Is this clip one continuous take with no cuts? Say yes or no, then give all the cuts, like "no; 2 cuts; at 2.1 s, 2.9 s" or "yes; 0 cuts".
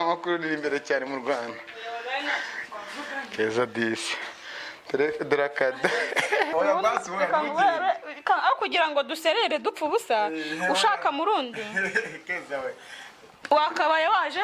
no; 1 cut; at 6.5 s